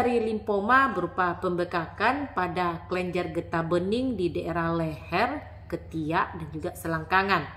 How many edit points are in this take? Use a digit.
0